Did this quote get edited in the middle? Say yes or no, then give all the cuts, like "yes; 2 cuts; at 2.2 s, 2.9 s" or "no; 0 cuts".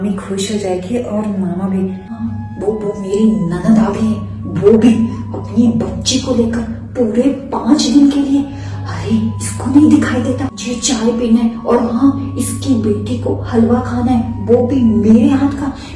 yes; 2 cuts; at 2.3 s, 10.7 s